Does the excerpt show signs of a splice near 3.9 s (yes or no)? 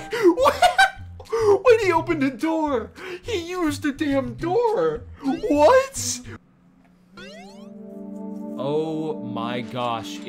no